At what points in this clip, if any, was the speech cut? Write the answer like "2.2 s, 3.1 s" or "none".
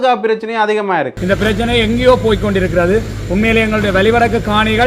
1.1 s

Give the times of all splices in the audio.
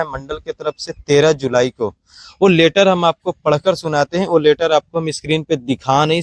none

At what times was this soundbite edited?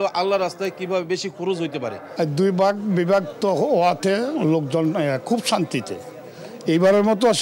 2.0 s

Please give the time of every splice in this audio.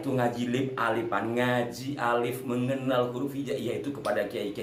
none

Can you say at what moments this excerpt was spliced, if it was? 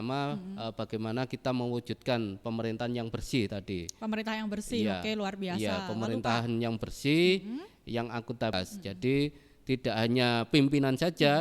8.6 s

